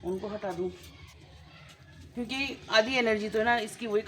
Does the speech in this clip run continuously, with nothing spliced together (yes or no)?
yes